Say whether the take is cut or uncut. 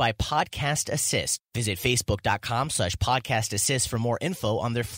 cut